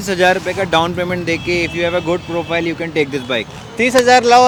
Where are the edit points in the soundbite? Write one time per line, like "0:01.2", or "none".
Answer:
none

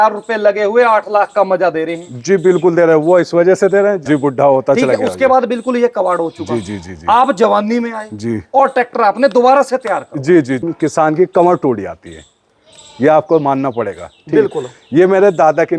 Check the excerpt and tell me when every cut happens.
0:04.0
0:10.7

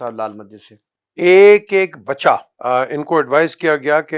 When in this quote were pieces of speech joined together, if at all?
0:02.5

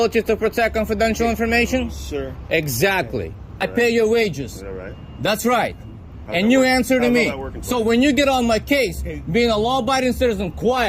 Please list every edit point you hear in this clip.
0:03.7

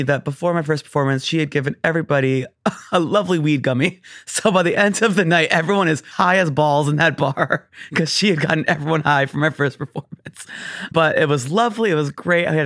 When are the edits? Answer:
0:06.1
0:10.9

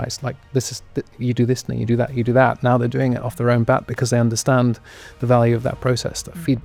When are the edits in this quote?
none

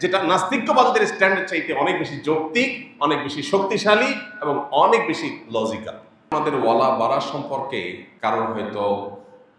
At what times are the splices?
0:06.3
0:08.0

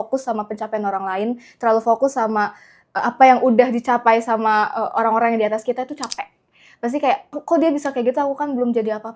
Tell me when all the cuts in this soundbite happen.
0:07.3

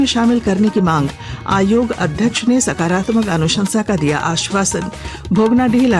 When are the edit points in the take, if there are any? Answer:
none

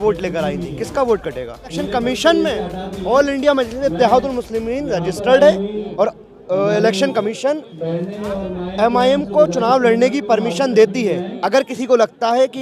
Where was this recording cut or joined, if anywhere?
0:01.8

